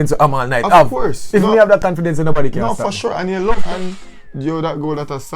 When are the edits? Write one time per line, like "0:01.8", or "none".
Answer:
0:03.7